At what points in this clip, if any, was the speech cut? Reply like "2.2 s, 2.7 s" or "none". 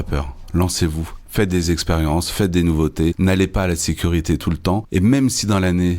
3.2 s, 4.9 s